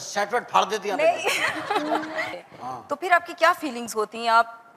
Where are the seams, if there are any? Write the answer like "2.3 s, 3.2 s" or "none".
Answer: 2.4 s